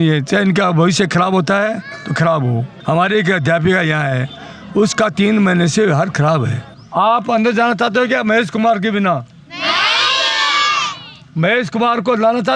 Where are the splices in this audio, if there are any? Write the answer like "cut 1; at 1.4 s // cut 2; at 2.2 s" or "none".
cut 1; at 2.7 s // cut 2; at 6.8 s